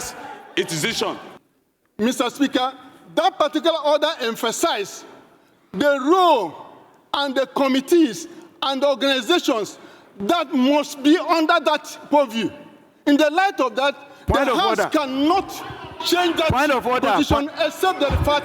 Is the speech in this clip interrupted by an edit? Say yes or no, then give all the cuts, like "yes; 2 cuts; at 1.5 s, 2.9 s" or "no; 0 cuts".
yes; 1 cut; at 1.3 s